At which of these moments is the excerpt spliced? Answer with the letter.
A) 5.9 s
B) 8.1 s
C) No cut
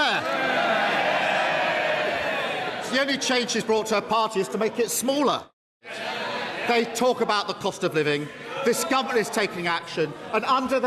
A